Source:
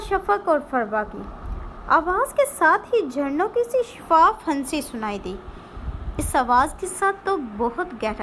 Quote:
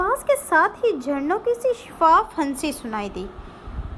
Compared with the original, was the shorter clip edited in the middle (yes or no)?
no